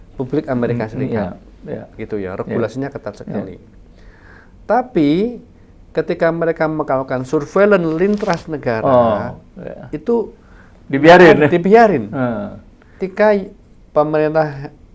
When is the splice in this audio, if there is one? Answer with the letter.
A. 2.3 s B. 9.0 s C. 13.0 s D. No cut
C